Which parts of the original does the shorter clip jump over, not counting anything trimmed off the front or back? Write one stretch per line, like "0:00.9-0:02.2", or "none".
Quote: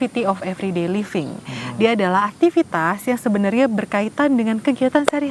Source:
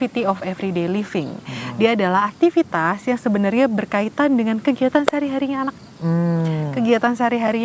none